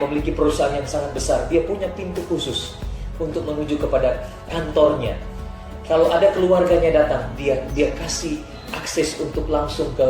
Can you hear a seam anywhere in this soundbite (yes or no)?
yes